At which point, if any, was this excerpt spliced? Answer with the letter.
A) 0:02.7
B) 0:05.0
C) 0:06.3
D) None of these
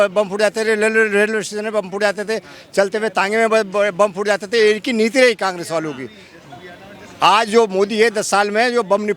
D